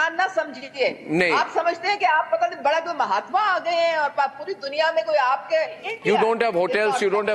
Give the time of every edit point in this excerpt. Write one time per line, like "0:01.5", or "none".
0:05.8